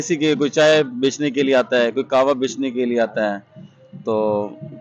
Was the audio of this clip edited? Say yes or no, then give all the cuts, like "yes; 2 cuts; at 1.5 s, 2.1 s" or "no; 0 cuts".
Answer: no; 0 cuts